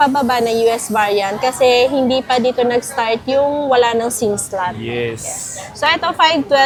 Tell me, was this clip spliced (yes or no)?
no